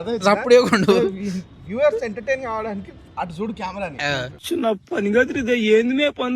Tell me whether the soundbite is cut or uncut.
uncut